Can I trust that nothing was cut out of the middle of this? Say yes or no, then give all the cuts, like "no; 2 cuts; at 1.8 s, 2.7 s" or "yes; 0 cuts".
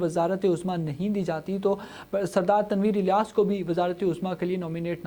yes; 0 cuts